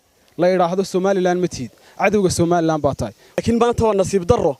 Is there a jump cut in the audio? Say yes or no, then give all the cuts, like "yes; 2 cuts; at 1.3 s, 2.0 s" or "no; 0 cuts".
yes; 1 cut; at 3.4 s